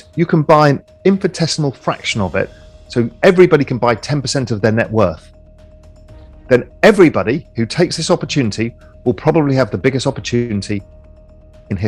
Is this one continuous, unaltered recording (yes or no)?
yes